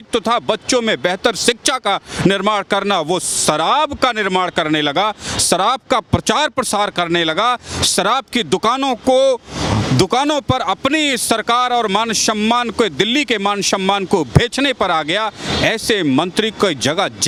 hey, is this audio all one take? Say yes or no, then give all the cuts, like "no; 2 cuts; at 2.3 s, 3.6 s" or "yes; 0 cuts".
yes; 0 cuts